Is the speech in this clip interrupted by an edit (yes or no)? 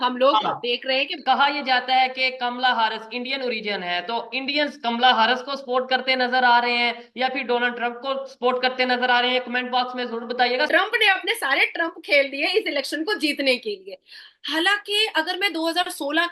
yes